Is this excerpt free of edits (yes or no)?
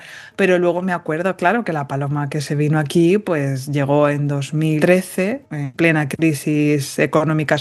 no